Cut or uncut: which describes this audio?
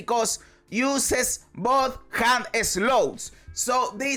uncut